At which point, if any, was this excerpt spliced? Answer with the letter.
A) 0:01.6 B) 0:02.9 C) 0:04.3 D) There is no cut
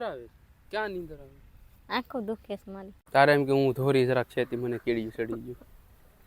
B